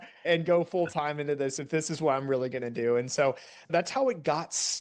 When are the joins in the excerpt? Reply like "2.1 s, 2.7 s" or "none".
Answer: 3.5 s